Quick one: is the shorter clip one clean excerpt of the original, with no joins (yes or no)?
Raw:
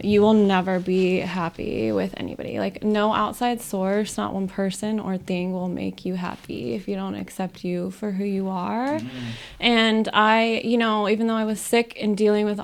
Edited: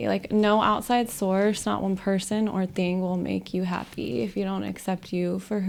yes